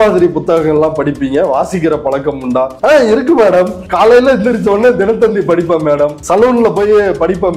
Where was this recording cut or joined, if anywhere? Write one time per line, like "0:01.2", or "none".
0:02.7
0:03.8
0:06.2